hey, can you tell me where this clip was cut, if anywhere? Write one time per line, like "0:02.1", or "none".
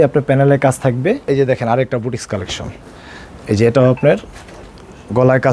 0:01.2